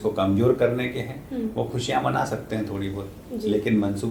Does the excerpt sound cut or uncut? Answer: uncut